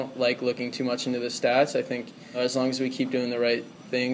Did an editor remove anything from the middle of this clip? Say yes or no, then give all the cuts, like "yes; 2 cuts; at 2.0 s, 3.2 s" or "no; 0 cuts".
yes; 1 cut; at 2.4 s